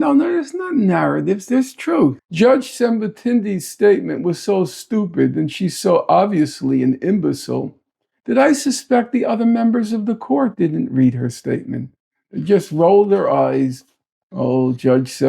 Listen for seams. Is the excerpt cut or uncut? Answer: cut